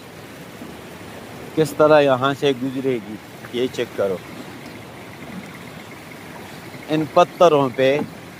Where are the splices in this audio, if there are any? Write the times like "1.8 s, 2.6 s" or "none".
none

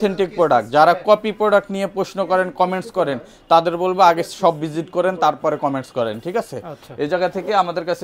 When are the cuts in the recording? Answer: none

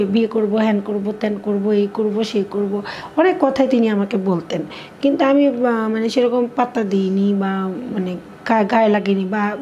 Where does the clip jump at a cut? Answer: none

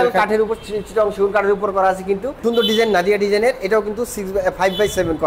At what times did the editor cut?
2.4 s

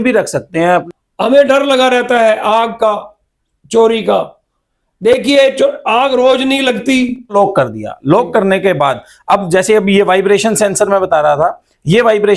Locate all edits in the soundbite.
0.8 s, 7.3 s

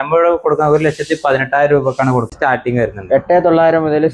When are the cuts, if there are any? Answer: 2.3 s

